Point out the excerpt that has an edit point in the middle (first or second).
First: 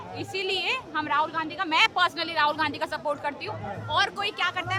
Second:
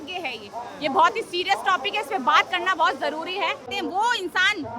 second